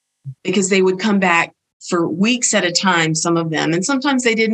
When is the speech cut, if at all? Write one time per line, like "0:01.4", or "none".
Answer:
none